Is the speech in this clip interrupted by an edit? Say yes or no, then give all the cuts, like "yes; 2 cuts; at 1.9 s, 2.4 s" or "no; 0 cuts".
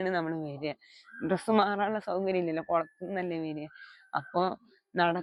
no; 0 cuts